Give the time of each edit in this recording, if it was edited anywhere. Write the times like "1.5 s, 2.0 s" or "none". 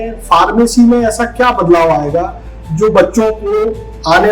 none